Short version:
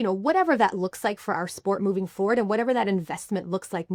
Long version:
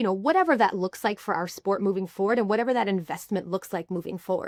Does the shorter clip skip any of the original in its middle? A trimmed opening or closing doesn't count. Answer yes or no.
no